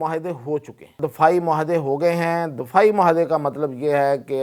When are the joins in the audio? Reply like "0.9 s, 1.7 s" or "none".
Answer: 0.9 s

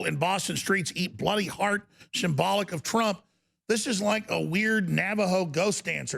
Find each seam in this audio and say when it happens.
none

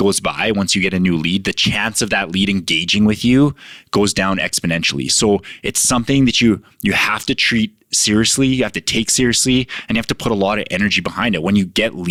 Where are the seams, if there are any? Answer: none

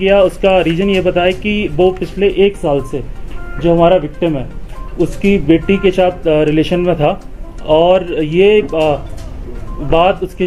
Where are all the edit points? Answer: none

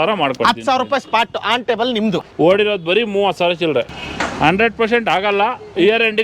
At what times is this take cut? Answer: 2.2 s, 3.9 s

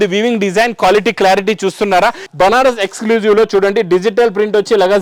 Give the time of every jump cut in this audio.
2.2 s

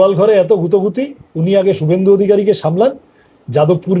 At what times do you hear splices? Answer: none

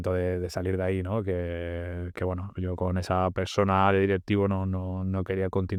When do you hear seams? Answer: none

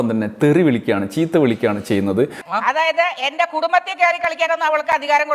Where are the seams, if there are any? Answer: 2.4 s

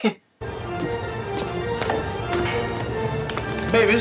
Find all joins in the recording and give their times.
none

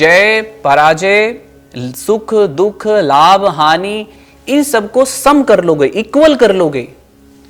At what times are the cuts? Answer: none

